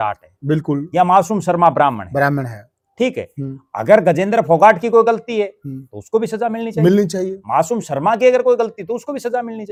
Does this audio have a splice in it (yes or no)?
no